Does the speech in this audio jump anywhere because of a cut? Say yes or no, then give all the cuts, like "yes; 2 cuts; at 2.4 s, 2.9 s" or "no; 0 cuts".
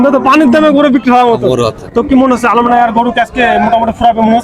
yes; 1 cut; at 1.8 s